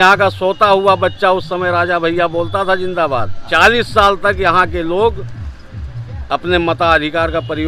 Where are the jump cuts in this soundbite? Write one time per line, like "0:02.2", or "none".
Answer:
0:03.4